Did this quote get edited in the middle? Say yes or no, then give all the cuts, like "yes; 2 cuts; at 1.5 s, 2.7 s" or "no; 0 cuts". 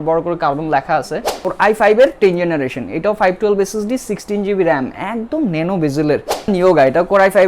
yes; 2 cuts; at 1.4 s, 6.5 s